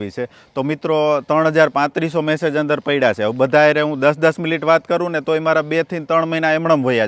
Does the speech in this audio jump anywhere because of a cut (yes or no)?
no